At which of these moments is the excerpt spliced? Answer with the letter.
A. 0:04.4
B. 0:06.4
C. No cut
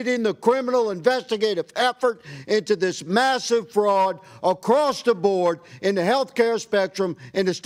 C